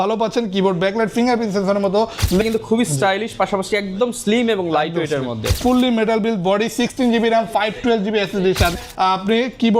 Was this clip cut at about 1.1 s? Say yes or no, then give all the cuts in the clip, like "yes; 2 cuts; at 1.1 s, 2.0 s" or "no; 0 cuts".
no; 3 cuts; at 2.4 s, 5.6 s, 8.7 s